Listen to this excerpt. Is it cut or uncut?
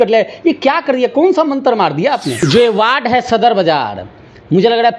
cut